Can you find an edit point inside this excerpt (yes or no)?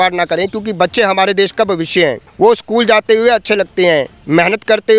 yes